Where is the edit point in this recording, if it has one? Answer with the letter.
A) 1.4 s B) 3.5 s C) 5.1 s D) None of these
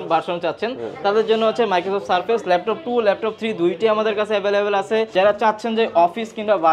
C